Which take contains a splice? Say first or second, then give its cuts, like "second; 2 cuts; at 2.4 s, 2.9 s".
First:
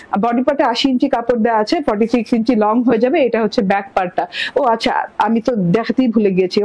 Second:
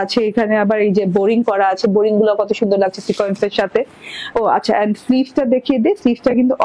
second; 2 cuts; at 0.9 s, 5.0 s